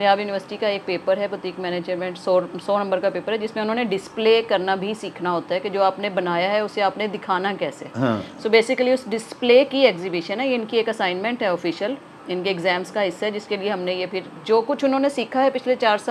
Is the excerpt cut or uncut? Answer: uncut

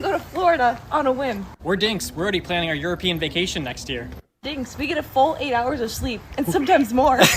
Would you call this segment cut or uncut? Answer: cut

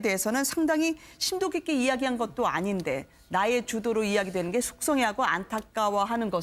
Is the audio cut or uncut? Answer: cut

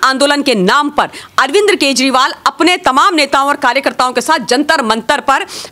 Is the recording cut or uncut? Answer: uncut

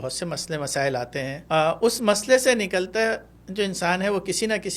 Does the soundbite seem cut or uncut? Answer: cut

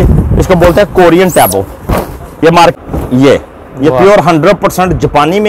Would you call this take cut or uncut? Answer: cut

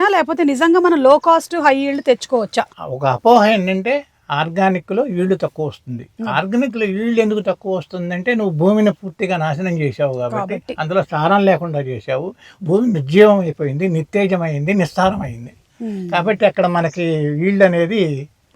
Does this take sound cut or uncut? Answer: cut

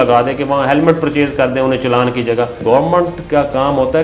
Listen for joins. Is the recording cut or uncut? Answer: cut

